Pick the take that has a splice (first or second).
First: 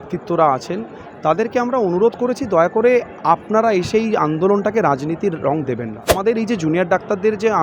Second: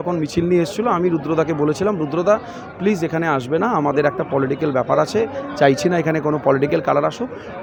first